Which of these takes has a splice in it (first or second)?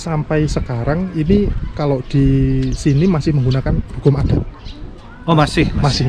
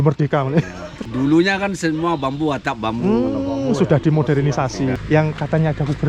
second